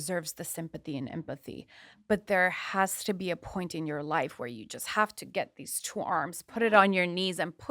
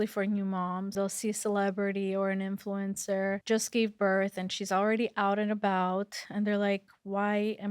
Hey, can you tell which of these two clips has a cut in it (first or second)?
second